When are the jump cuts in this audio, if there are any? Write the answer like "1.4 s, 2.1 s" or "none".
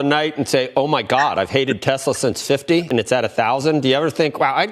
2.9 s